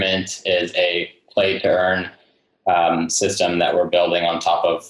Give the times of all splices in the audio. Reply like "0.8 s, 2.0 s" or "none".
none